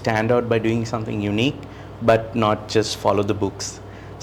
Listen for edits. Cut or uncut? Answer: uncut